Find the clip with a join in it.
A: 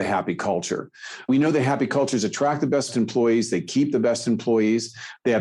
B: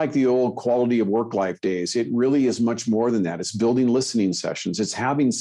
A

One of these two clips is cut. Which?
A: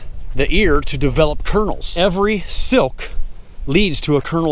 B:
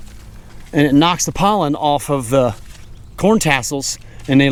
A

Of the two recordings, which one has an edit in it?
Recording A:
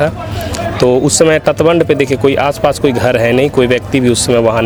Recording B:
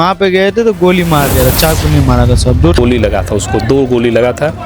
B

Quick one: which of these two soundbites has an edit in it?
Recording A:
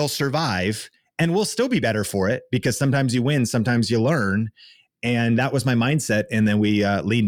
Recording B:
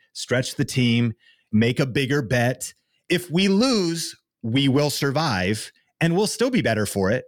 B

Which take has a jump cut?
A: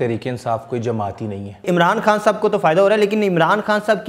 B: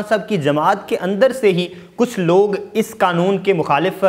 A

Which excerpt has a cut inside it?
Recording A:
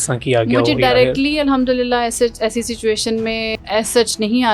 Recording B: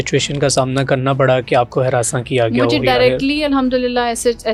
A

